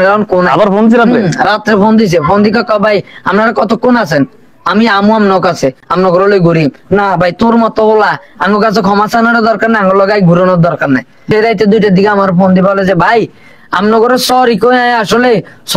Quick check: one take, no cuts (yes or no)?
no